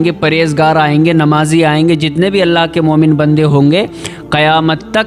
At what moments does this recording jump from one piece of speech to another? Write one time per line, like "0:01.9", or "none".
none